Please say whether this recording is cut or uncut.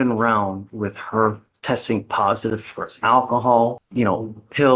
cut